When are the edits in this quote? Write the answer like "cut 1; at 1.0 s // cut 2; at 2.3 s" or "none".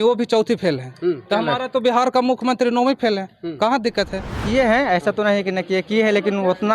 cut 1; at 4.4 s